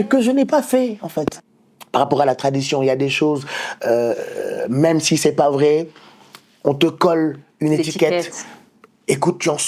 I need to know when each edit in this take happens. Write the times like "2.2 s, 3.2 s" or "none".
1.7 s